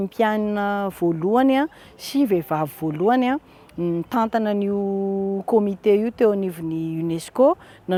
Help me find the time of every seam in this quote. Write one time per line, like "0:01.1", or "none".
none

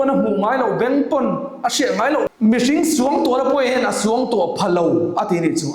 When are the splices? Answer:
0:02.3

